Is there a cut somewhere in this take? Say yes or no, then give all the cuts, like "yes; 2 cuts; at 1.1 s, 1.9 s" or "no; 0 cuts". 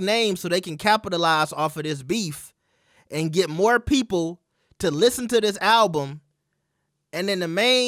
no; 0 cuts